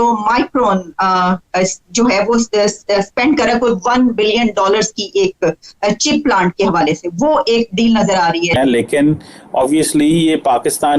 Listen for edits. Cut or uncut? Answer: cut